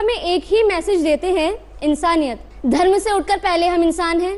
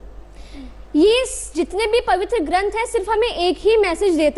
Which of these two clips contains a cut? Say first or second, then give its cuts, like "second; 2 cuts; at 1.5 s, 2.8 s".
first; 1 cut; at 2.5 s